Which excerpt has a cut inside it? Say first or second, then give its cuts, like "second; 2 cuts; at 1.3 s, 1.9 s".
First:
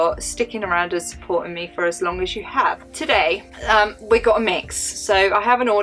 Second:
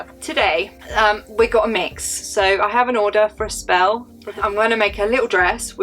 second; 1 cut; at 4.2 s